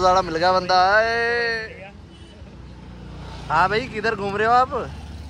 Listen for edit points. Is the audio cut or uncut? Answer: uncut